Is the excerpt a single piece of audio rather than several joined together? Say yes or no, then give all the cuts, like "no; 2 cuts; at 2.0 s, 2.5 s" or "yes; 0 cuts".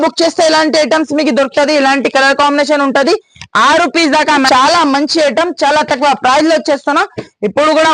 no; 1 cut; at 4.5 s